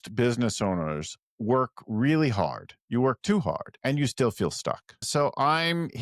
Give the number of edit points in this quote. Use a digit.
2